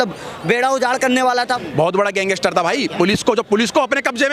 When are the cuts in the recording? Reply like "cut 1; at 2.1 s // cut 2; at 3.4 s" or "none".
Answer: cut 1; at 1.5 s